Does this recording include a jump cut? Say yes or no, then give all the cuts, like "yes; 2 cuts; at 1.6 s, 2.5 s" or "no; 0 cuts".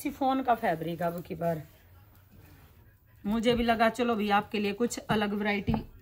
no; 0 cuts